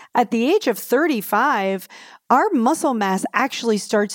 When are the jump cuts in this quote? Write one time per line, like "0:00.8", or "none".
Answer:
none

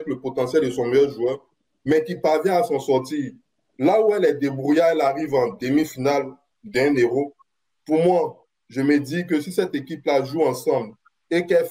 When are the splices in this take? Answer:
none

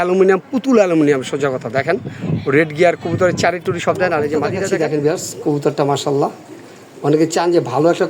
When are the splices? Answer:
0:04.8

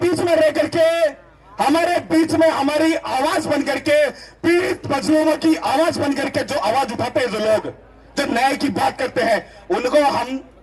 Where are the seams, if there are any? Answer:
none

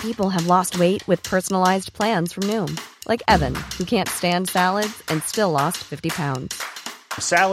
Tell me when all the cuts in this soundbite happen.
none

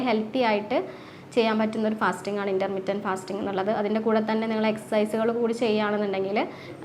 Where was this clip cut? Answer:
none

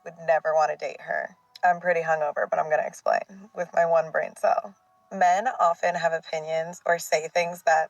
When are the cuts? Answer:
0:05.0

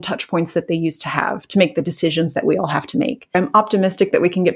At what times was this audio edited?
0:03.3

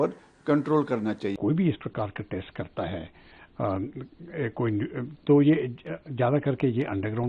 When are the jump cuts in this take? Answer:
0:01.4

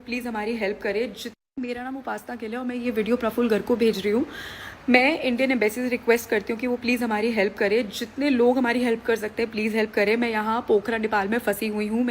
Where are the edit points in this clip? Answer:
0:01.3

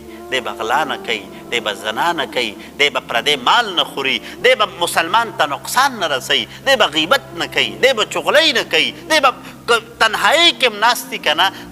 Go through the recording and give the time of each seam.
none

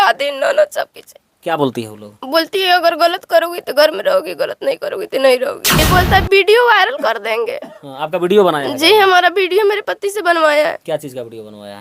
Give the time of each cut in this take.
0:05.8

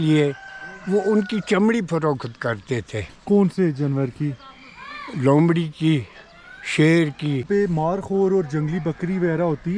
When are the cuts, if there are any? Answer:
0:07.5

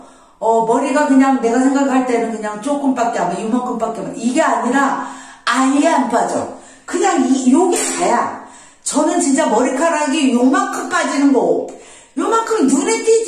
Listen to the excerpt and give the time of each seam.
none

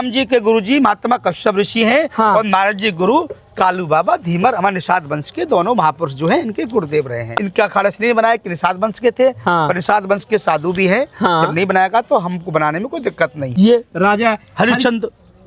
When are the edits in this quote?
0:07.3
0:13.4

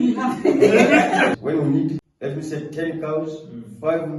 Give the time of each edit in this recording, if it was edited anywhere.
0:01.3

